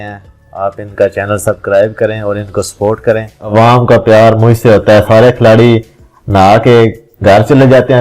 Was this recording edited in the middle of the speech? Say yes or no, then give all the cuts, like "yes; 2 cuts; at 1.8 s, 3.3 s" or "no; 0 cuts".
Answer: yes; 1 cut; at 3.4 s